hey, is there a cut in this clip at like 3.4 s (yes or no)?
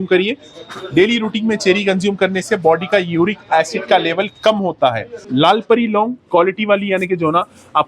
no